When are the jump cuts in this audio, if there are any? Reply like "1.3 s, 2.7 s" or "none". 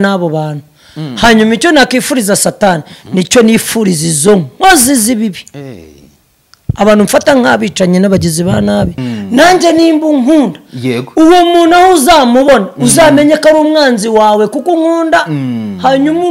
9.1 s